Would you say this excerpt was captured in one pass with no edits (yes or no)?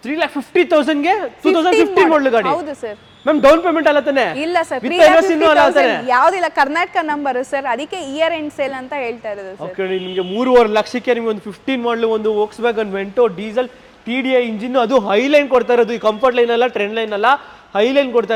yes